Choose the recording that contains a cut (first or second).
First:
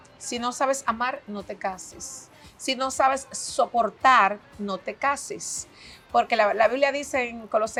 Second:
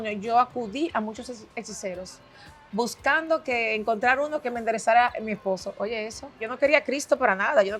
second